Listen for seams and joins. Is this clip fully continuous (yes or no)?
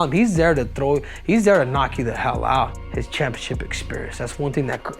no